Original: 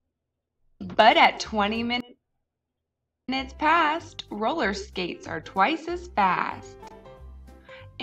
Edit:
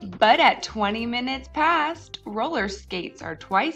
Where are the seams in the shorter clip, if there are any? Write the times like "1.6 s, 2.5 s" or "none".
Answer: 1.2 s

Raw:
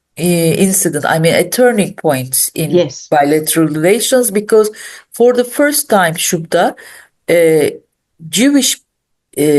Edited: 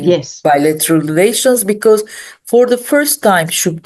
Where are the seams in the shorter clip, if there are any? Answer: none

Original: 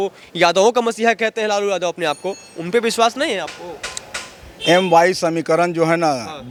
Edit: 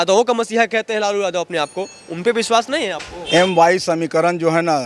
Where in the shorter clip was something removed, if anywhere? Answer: 3.1 s

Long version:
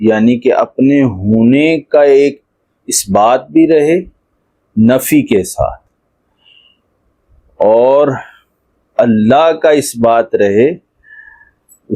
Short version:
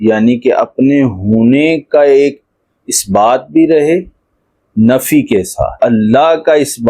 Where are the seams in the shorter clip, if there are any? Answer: 5.7 s

